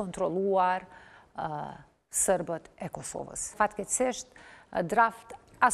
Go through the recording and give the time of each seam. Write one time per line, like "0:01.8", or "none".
0:03.5

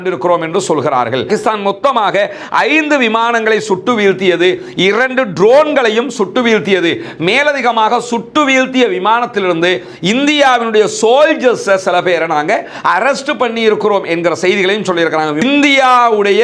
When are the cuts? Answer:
0:01.2
0:15.3

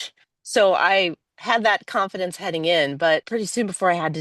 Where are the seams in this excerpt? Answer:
0:03.3

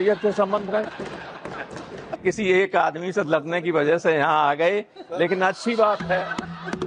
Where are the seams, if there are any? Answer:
0:02.2

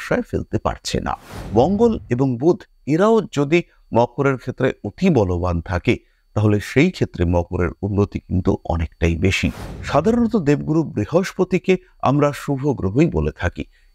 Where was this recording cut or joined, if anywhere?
0:01.3
0:09.6

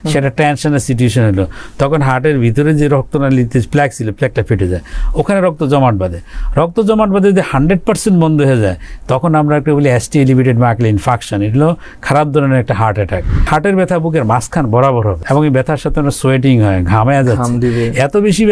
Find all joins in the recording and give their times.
0:13.5
0:15.2

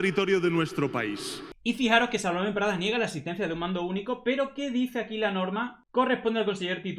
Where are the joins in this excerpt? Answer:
0:01.5

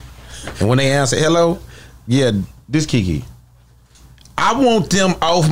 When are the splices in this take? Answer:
none

